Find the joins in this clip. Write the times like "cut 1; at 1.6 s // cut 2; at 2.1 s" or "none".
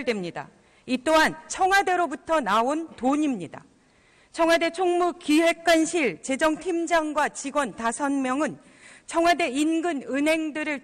none